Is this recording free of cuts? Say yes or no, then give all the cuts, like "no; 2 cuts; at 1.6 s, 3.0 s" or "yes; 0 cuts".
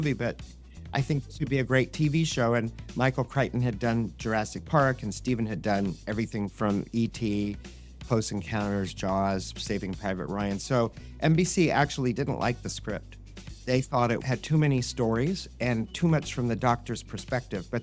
no; 1 cut; at 14.2 s